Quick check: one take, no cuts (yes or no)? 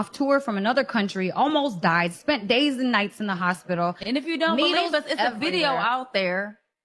yes